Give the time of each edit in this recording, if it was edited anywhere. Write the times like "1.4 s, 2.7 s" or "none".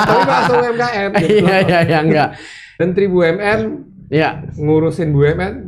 2.8 s

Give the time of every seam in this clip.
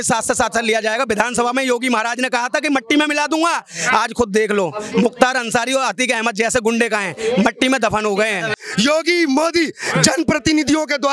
8.6 s

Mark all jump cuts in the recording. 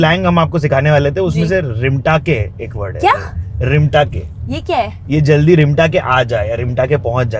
none

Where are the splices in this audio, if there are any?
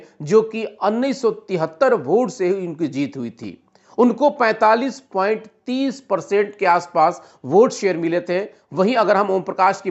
none

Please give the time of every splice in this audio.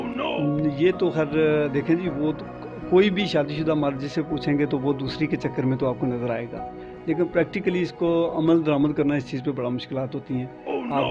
none

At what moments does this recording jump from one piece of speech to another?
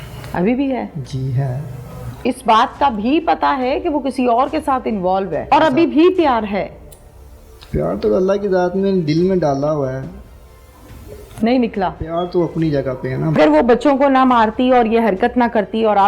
5.5 s, 13.4 s

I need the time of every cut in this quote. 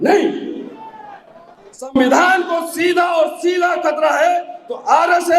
none

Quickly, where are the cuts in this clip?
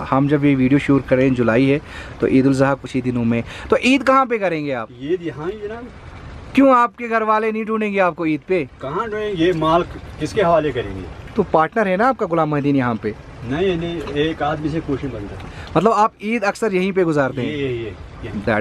none

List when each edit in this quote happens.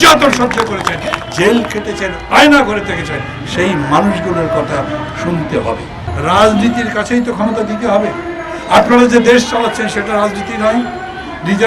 6.1 s

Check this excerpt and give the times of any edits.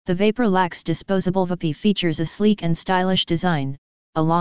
1.5 s, 3.6 s

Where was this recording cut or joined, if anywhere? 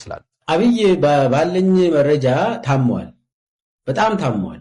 none

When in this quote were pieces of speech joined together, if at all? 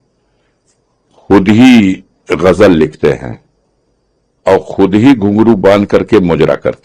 none

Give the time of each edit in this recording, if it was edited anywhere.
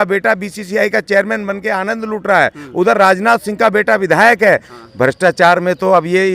4.7 s

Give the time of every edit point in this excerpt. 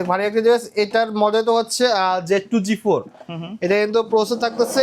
none

